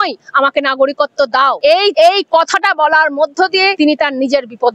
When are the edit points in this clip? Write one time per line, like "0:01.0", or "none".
0:01.8
0:03.7